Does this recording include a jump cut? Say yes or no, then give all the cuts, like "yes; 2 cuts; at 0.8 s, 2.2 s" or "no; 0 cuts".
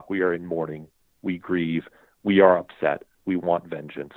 no; 0 cuts